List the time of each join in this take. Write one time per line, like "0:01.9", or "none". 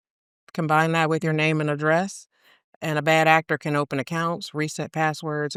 none